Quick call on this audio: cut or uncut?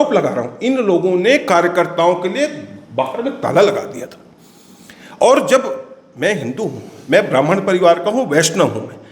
uncut